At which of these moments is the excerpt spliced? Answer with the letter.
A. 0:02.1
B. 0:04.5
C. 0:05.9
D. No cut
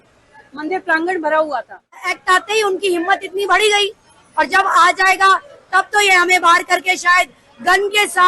A